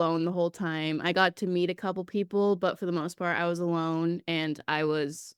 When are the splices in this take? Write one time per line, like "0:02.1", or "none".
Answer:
none